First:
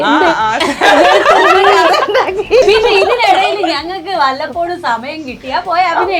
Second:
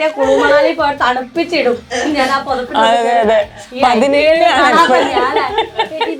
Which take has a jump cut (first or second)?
first